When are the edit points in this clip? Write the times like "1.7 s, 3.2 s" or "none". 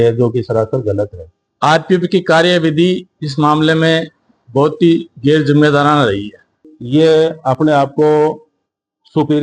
1.4 s, 6.7 s